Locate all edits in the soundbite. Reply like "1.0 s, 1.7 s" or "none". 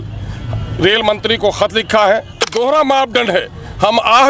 2.5 s